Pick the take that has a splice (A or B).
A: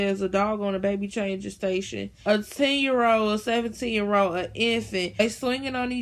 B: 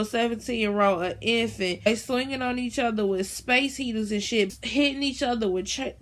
B